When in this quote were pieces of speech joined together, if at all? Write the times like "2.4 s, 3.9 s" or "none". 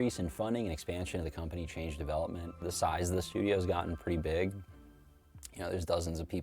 5.2 s